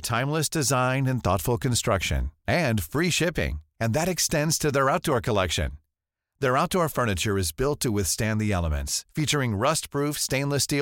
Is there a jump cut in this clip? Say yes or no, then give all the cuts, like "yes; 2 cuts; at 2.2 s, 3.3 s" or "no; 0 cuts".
no; 0 cuts